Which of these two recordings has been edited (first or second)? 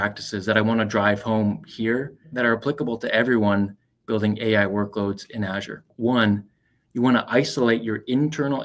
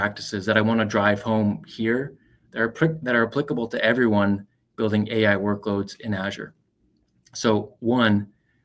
first